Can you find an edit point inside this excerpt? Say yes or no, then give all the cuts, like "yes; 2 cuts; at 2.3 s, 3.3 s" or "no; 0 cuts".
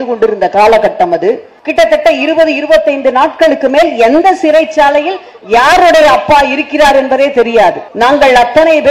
yes; 2 cuts; at 1.5 s, 7.9 s